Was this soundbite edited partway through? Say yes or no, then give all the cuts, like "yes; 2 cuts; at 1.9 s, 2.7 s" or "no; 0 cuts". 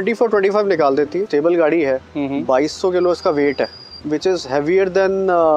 yes; 2 cuts; at 1.2 s, 3.9 s